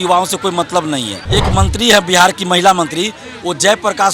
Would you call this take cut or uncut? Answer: cut